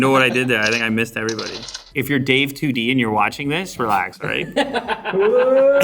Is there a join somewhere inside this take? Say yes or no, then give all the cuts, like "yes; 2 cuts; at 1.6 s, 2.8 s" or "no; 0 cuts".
yes; 1 cut; at 1.8 s